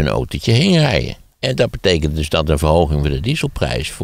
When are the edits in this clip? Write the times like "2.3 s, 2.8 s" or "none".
1.2 s